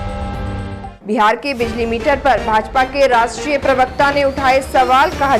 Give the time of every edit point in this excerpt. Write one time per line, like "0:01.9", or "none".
0:01.0